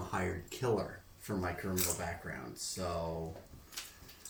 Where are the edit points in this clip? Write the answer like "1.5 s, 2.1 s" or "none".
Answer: none

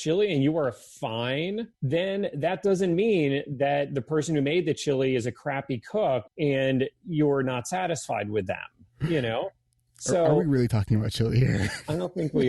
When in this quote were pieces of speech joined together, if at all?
1.8 s, 6.3 s

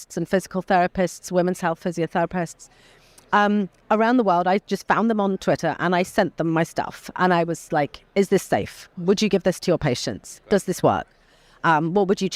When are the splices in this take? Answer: none

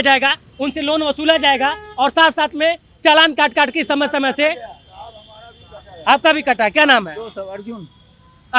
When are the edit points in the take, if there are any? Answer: none

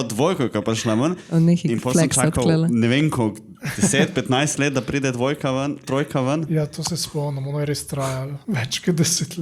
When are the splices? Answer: 8.3 s

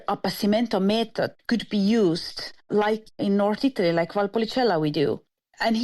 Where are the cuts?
1.4 s

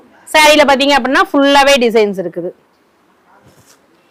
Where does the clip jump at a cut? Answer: none

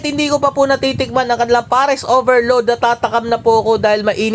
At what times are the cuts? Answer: none

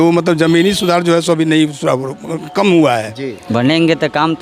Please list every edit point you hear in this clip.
3.4 s

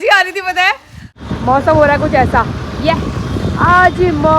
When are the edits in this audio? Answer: 1.2 s

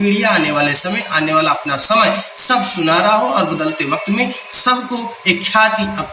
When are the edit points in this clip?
none

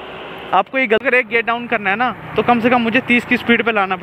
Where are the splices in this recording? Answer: 1.0 s

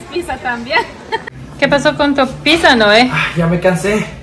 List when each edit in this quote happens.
1.3 s

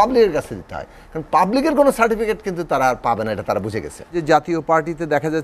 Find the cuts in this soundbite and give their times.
4.1 s

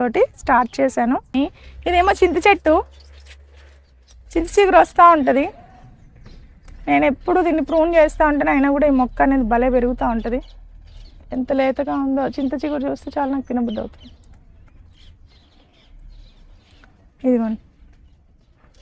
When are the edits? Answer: 1.3 s

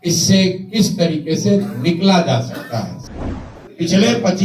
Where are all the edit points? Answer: 3.0 s

